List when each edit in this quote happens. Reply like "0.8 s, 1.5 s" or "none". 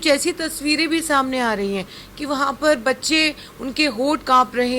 none